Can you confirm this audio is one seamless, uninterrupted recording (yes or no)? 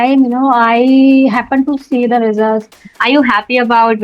no